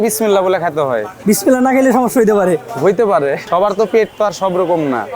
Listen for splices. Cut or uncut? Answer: uncut